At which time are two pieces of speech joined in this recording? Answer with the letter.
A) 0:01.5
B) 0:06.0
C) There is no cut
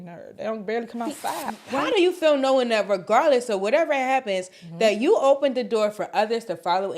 A